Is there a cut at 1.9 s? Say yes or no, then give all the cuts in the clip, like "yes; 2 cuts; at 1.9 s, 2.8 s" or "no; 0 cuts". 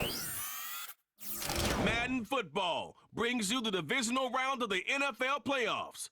yes; 1 cut; at 1.9 s